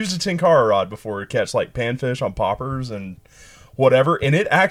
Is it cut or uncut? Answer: uncut